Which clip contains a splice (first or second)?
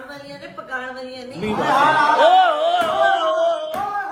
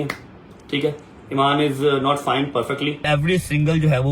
second